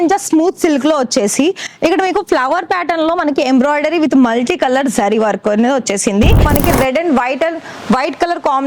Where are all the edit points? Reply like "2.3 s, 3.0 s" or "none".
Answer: 6.5 s